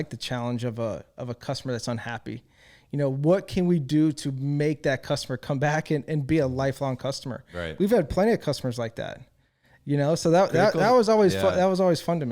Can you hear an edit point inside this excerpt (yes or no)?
no